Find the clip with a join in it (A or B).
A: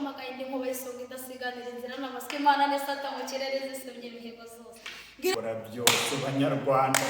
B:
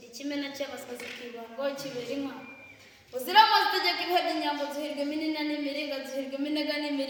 A